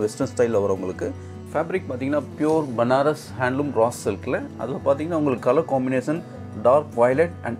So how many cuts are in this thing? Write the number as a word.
one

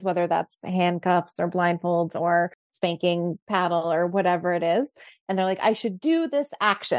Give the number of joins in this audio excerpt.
one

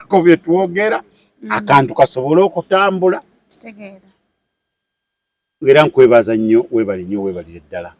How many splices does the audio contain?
zero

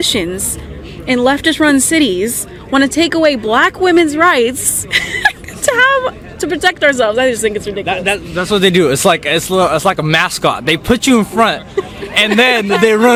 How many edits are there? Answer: zero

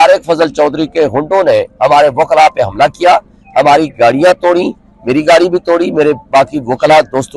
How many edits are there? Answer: zero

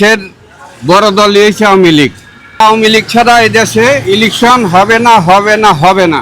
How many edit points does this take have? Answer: one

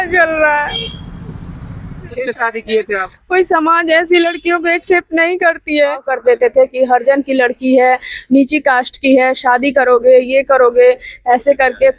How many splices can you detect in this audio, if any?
two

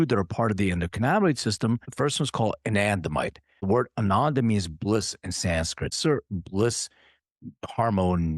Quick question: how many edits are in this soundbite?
three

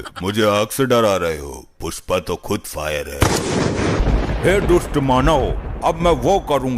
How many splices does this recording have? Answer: one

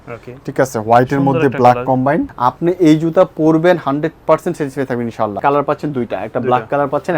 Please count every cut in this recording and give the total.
two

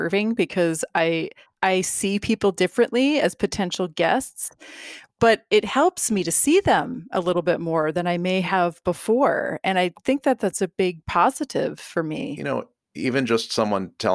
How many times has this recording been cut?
one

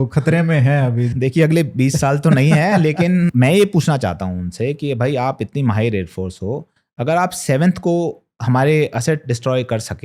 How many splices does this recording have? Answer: two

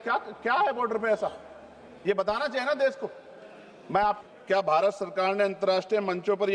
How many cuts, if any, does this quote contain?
one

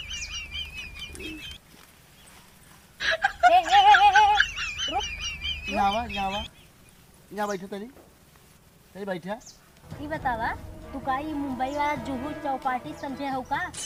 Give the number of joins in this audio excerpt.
zero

